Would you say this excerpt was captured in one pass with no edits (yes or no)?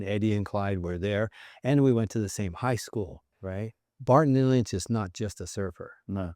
no